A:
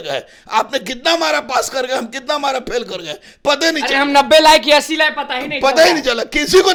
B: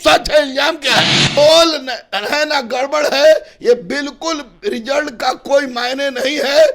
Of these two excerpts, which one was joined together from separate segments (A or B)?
B